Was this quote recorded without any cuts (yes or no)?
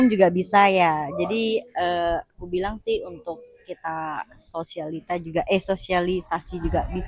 yes